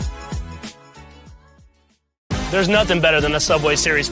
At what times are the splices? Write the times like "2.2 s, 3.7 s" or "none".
none